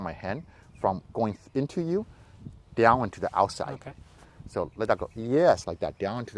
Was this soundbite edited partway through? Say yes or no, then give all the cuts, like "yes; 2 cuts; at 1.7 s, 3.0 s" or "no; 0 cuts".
no; 0 cuts